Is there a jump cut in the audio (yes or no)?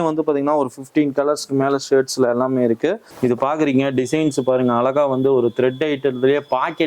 yes